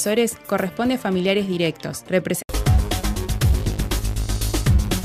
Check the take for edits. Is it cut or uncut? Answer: uncut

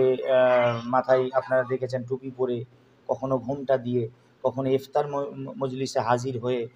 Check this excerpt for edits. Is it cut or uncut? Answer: uncut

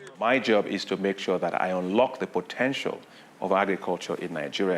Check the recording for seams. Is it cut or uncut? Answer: uncut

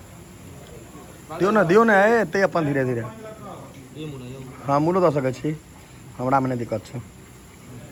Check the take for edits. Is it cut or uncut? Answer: uncut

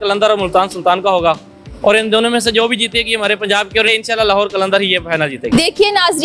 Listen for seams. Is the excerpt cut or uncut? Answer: cut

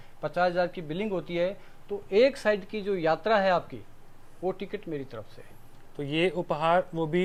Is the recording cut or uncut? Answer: uncut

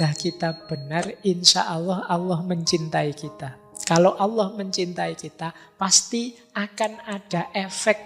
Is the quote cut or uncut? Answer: uncut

